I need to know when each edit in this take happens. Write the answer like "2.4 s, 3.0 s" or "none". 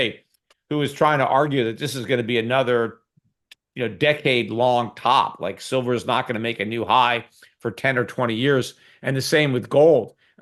none